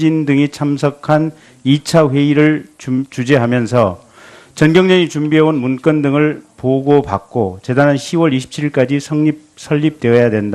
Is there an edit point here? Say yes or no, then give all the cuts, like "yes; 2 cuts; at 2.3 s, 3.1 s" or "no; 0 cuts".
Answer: yes; 1 cut; at 1.8 s